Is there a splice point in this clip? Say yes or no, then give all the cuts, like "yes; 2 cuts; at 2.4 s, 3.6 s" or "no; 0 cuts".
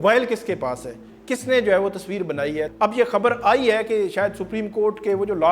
yes; 1 cut; at 2.8 s